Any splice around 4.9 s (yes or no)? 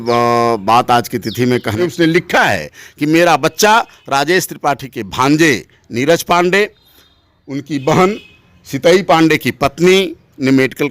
no